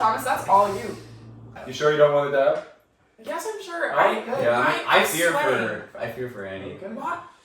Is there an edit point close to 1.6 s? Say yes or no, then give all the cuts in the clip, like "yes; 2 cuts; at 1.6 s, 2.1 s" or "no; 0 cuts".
yes; 1 cut; at 1.6 s